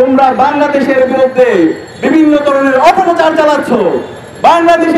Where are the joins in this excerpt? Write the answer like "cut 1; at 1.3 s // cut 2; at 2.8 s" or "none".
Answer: none